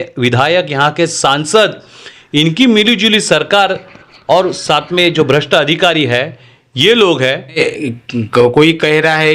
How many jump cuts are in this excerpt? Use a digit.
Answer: 1